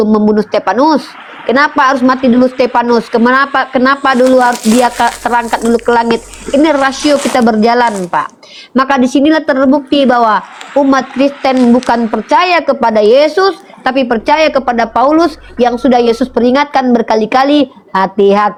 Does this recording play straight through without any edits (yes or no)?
yes